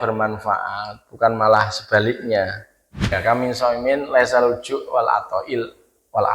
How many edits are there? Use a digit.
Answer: 1